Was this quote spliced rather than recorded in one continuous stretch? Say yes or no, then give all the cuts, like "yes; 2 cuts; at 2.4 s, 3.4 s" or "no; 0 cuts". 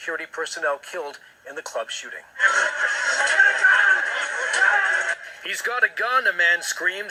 no; 0 cuts